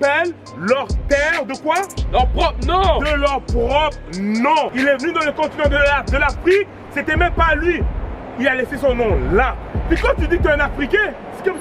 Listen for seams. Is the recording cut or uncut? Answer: cut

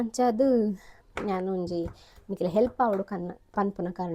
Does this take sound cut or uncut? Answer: uncut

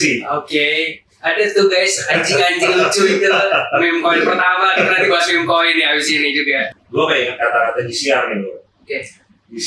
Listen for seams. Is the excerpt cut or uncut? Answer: cut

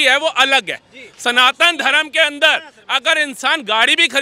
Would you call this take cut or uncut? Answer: uncut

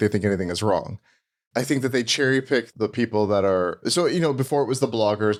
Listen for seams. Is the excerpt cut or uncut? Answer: uncut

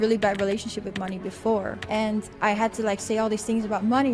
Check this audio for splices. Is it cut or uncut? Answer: cut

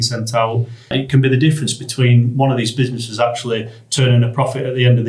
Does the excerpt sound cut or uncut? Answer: cut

